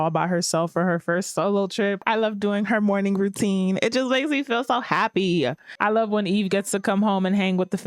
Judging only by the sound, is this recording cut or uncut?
cut